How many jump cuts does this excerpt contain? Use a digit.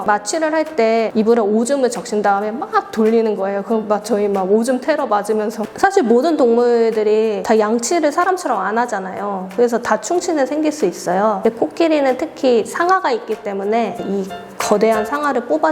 3